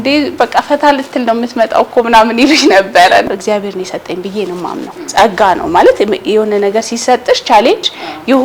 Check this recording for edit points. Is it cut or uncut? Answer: cut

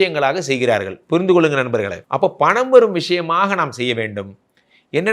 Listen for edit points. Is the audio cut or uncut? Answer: cut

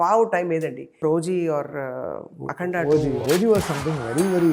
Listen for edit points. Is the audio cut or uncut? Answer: cut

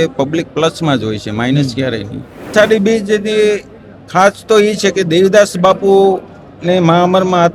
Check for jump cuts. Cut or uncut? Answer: cut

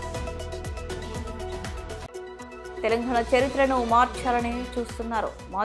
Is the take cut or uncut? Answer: uncut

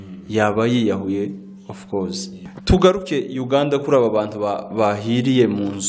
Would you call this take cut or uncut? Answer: cut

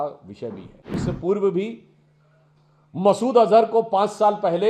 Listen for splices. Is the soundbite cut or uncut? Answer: cut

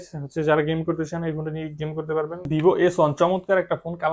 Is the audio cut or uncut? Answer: cut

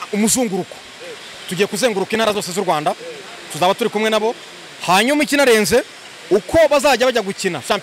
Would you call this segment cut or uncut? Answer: uncut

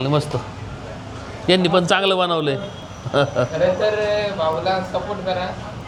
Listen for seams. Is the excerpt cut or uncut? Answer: uncut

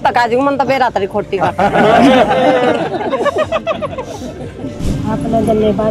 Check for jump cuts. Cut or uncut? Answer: cut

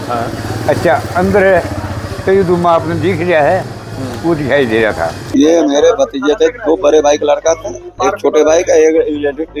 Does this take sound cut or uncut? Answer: cut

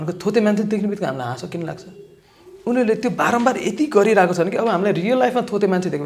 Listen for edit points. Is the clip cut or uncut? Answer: uncut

